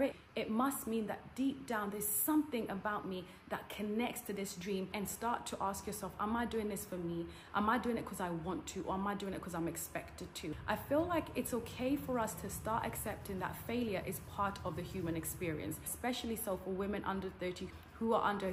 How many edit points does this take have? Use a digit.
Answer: 3